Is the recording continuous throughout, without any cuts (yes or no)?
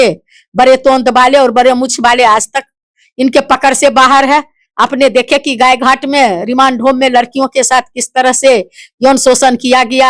yes